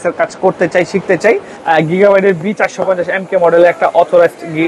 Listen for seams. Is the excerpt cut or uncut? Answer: cut